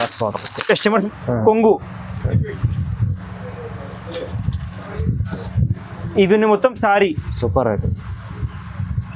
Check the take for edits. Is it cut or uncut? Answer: cut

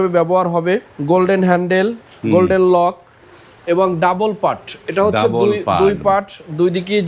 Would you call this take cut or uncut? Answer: cut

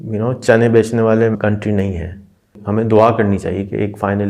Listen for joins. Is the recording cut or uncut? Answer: cut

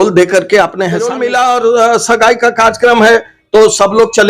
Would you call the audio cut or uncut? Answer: cut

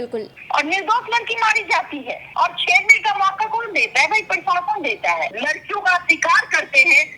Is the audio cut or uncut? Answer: cut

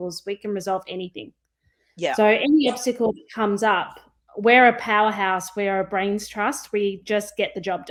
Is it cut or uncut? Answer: uncut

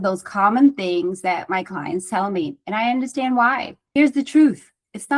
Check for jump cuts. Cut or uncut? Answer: cut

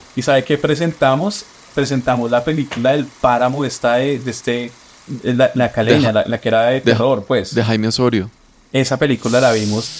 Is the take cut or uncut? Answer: uncut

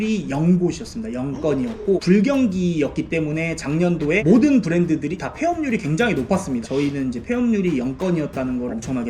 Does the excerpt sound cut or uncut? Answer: cut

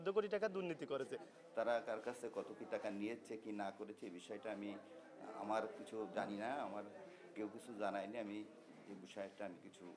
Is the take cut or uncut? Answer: cut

